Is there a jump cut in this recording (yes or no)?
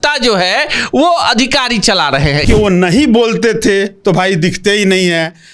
yes